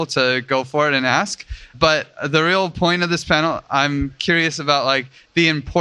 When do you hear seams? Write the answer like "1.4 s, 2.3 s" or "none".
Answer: 1.7 s